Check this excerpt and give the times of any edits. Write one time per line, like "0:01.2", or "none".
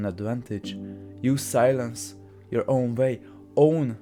none